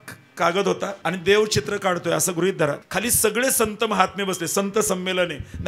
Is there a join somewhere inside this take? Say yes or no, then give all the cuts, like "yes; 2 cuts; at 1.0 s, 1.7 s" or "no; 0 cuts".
yes; 2 cuts; at 1.0 s, 2.8 s